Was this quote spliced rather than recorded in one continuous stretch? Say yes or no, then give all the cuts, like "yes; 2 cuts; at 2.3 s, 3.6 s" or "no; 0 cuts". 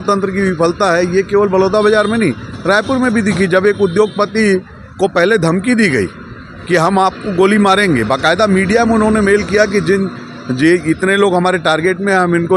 no; 0 cuts